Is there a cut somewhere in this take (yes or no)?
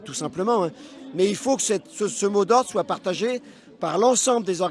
no